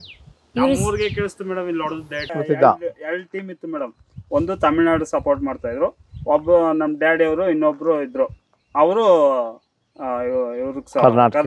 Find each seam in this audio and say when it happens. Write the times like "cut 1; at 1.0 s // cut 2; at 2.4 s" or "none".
cut 1; at 2.4 s